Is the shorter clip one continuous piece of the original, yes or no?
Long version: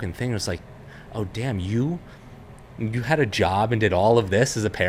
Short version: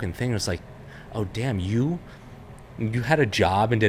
yes